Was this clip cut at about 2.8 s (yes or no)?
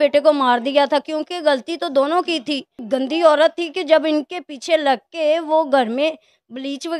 yes